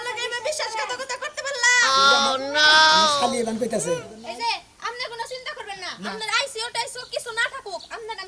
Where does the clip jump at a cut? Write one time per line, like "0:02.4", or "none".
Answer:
0:04.1